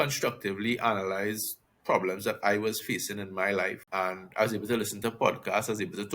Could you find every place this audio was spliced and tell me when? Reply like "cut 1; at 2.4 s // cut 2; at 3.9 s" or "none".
cut 1; at 3.8 s